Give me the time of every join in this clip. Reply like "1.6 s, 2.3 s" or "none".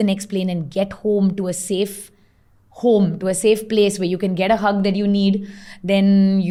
none